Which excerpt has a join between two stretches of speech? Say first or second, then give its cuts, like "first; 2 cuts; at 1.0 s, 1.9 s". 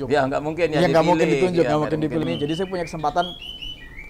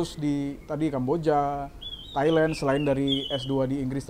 first; 1 cut; at 2.2 s